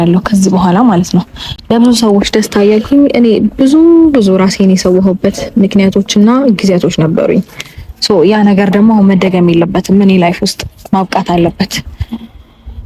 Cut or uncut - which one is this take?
uncut